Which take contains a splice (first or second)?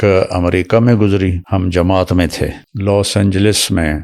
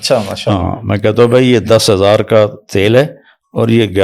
first